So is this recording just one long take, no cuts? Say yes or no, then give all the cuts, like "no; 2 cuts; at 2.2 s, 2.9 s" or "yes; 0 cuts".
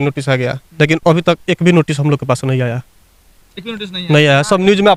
yes; 0 cuts